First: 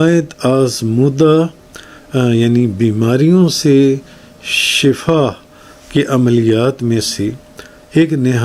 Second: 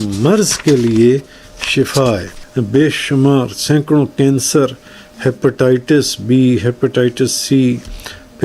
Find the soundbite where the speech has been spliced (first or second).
second